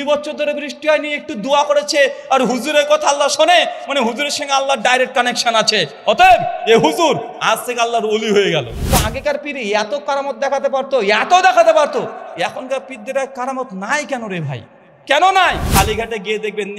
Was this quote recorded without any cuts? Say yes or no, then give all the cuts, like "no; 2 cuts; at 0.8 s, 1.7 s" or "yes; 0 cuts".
no; 2 cuts; at 8.8 s, 15.6 s